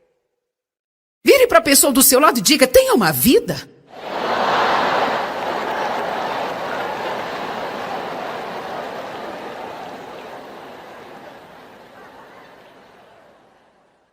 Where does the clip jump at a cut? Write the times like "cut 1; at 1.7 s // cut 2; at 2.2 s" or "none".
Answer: cut 1; at 9.3 s